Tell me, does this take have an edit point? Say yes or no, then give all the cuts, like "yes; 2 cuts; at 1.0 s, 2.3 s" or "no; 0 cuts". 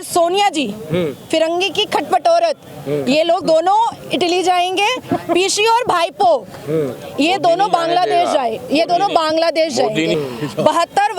yes; 1 cut; at 10.2 s